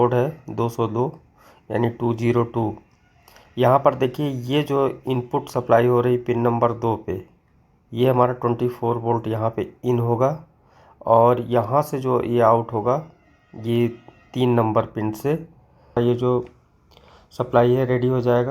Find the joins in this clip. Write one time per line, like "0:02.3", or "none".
0:16.0